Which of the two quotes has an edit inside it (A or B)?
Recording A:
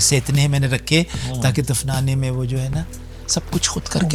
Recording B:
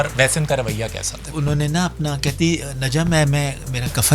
B